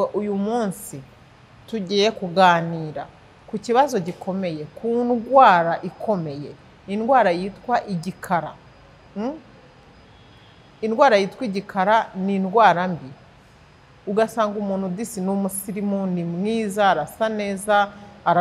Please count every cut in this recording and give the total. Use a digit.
0